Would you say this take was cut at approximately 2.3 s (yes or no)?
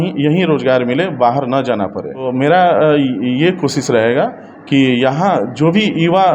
yes